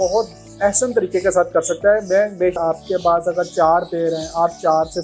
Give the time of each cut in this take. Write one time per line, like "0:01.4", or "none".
0:02.6